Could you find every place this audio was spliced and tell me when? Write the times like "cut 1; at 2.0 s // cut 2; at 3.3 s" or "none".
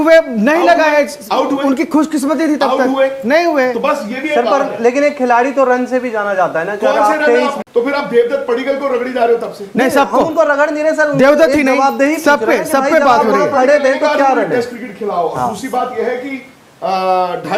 cut 1; at 7.6 s